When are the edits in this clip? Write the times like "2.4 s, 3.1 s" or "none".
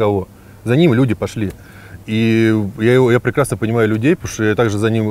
none